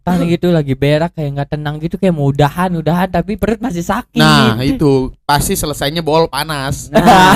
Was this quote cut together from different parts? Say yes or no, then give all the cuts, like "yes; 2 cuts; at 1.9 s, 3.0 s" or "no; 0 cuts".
no; 0 cuts